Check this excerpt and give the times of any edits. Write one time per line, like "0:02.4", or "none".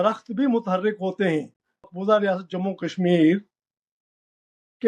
0:01.9